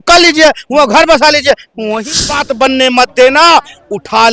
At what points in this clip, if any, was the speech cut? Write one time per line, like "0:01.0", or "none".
0:02.2